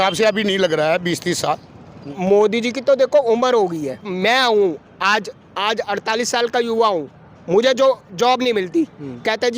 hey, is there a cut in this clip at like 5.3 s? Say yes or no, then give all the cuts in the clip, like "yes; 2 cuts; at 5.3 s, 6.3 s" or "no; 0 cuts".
no; 2 cuts; at 2.0 s, 4.1 s